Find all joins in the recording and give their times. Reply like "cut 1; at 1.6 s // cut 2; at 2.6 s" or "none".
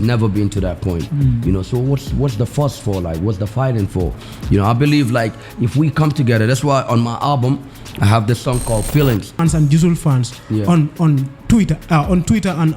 cut 1; at 9.4 s